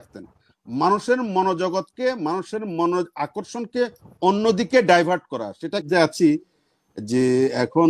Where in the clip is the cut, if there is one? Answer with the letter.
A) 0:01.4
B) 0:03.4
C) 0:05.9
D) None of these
C